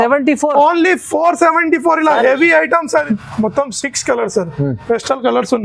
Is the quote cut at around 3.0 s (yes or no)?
yes